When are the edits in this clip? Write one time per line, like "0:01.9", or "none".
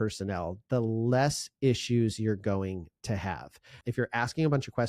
0:03.8